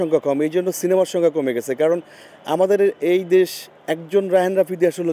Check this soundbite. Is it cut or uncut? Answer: uncut